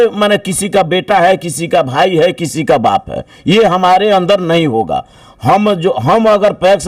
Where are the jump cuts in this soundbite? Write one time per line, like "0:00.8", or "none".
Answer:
none